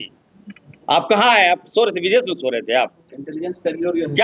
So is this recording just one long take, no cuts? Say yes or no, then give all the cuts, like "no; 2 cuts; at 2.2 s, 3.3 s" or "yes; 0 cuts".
yes; 0 cuts